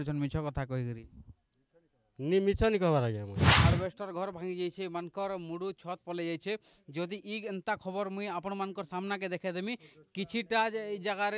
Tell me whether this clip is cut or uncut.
cut